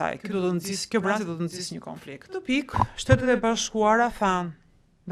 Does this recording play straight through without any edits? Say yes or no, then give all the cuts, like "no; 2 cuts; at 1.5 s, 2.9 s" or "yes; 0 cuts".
no; 1 cut; at 2.4 s